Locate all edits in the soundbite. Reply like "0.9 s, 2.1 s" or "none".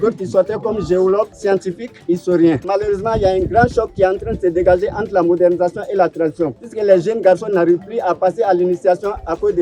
1.6 s, 2.6 s, 6.6 s